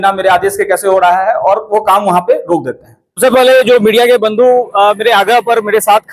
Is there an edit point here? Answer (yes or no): yes